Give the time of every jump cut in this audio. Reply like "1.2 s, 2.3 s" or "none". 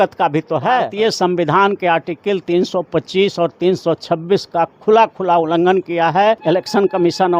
0.9 s, 6.4 s